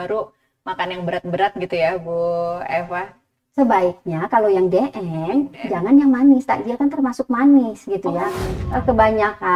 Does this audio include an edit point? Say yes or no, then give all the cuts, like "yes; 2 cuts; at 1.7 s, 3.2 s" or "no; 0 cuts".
yes; 1 cut; at 8.5 s